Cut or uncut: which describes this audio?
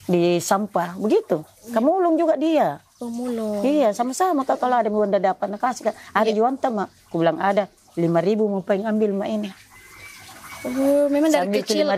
uncut